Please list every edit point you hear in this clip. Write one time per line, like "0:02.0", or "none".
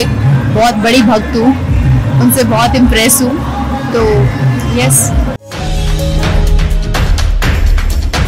0:05.4